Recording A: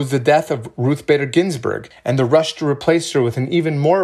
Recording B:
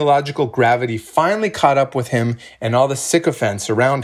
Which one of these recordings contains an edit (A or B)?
A